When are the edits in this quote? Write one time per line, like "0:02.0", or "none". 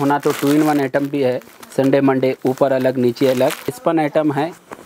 0:03.8